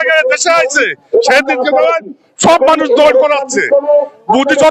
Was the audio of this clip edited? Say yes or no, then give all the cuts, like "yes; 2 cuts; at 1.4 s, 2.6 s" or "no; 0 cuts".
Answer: no; 0 cuts